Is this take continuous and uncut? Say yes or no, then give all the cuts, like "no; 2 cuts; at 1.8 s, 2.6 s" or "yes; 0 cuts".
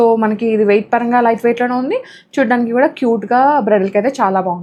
yes; 0 cuts